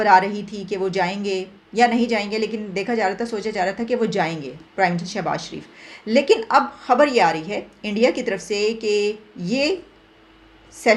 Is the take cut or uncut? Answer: uncut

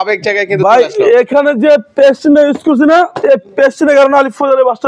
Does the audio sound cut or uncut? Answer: uncut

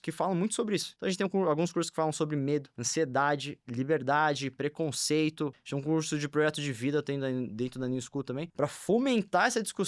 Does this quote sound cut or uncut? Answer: cut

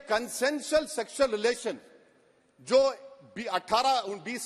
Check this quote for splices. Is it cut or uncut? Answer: uncut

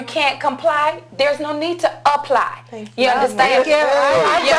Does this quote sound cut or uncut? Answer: uncut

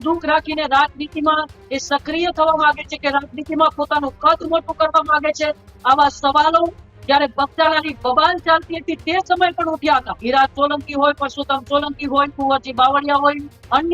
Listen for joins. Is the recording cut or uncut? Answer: cut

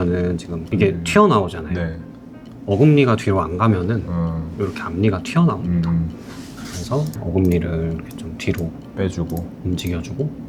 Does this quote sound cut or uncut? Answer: uncut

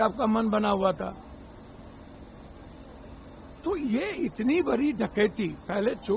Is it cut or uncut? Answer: uncut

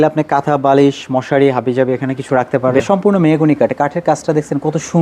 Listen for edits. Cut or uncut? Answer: cut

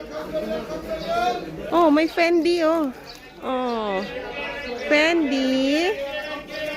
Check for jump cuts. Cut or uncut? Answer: cut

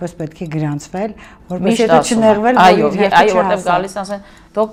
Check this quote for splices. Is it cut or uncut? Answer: uncut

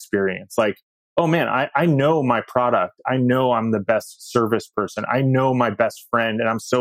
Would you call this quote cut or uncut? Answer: uncut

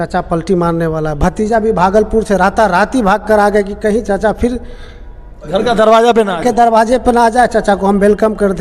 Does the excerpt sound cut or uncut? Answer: uncut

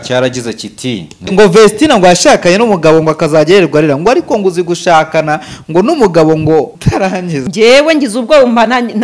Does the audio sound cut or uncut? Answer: cut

